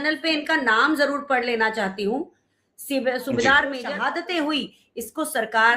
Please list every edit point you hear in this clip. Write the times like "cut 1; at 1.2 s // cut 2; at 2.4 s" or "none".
cut 1; at 3.9 s